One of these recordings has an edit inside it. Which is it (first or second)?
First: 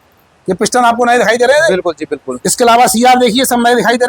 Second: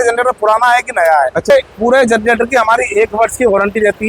second